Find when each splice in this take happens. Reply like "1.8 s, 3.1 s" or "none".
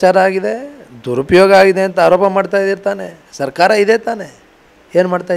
none